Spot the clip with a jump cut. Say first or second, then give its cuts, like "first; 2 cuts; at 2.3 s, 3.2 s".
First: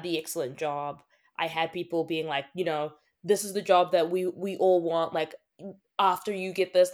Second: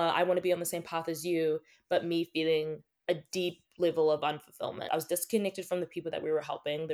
second; 1 cut; at 4.9 s